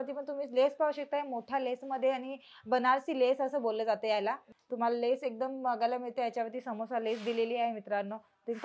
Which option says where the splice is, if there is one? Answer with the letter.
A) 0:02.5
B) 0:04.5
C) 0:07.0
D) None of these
B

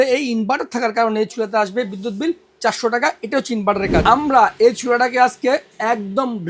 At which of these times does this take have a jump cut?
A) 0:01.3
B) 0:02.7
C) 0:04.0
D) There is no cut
C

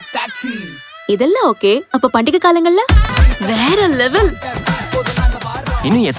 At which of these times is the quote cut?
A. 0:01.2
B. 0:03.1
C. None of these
B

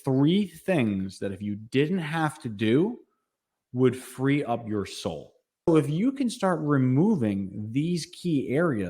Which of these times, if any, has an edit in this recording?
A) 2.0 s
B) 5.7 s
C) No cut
B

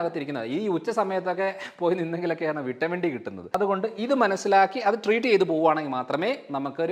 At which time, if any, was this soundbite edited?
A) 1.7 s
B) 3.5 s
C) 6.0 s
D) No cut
B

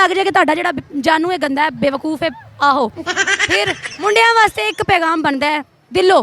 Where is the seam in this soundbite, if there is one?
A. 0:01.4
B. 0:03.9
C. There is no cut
B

